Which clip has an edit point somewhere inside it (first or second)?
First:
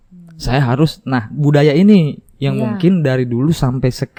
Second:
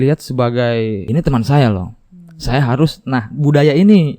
second